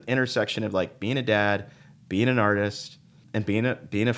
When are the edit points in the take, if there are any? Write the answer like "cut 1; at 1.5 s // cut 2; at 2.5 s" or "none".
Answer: cut 1; at 3.2 s

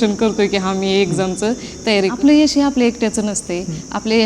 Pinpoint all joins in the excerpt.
cut 1; at 2.1 s

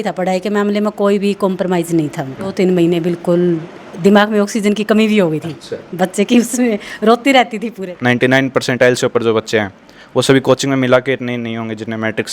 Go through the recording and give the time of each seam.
cut 1; at 2.5 s // cut 2; at 7.9 s

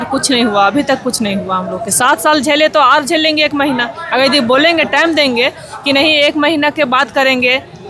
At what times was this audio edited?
none

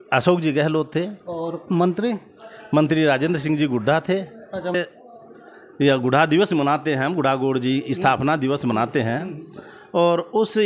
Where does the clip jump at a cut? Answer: cut 1; at 4.7 s

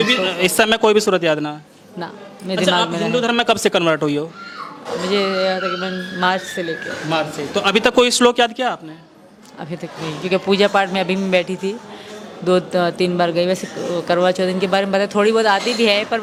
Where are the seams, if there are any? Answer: none

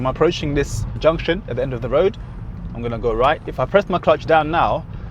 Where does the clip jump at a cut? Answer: cut 1; at 1.0 s

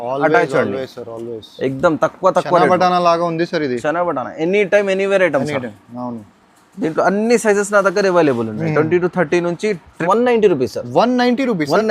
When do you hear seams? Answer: cut 1; at 10.0 s

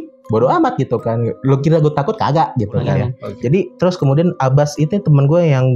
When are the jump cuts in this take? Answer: cut 1; at 3.2 s

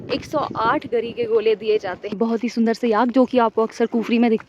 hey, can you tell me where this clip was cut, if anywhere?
cut 1; at 2.2 s

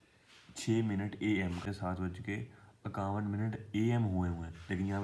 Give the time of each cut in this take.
cut 1; at 1.6 s

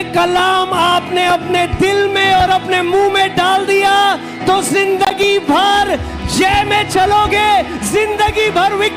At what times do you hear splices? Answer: none

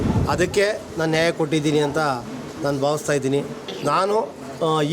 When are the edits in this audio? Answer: cut 1; at 3.6 s

